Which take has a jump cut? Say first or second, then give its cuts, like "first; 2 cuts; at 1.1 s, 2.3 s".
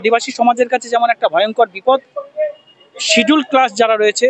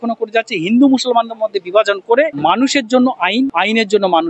second; 2 cuts; at 2.3 s, 3.5 s